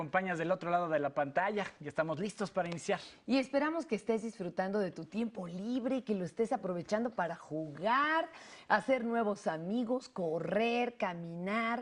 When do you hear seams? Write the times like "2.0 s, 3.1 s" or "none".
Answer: 1.0 s

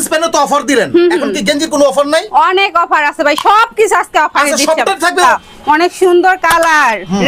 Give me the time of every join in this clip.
5.2 s

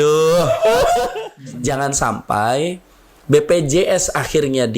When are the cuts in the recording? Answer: 1.2 s

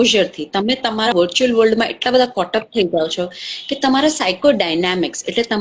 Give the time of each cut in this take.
1.1 s

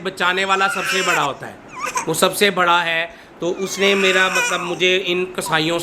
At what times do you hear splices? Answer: none

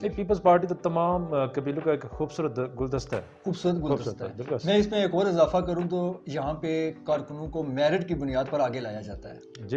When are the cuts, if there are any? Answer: none

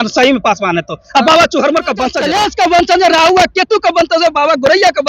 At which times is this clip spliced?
2.2 s

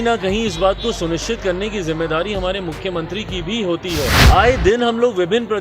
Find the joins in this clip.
4.2 s

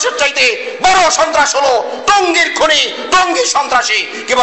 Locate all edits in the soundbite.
none

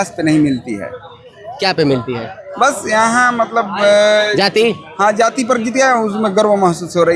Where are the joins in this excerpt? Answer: none

